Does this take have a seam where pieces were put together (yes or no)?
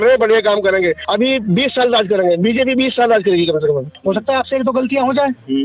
yes